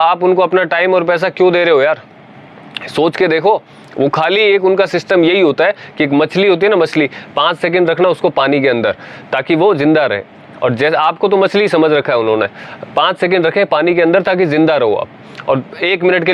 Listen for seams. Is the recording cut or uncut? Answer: uncut